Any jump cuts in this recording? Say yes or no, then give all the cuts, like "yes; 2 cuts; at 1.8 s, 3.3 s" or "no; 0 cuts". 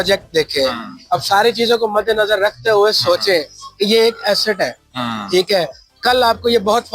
no; 0 cuts